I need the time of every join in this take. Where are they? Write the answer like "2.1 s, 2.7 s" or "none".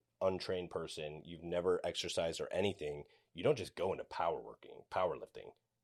none